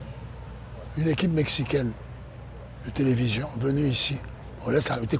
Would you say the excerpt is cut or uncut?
uncut